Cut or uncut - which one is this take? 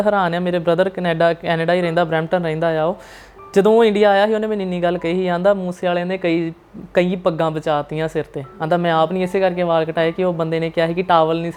uncut